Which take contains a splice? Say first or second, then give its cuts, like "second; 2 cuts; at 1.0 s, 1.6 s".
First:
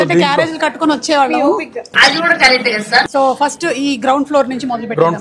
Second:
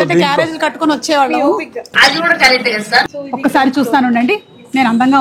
second; 1 cut; at 3.1 s